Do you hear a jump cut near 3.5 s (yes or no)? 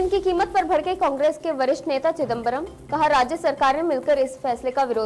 no